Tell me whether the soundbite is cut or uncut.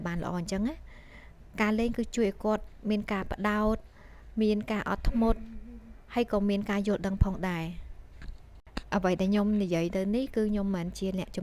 uncut